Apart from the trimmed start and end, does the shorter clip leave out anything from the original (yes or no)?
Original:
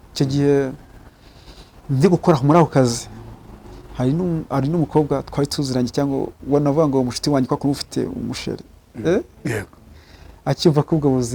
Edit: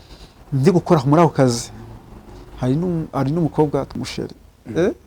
yes